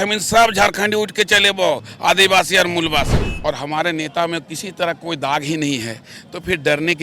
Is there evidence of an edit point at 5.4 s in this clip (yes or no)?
no